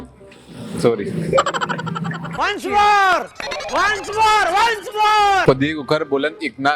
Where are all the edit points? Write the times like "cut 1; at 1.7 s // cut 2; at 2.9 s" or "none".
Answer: cut 1; at 2.3 s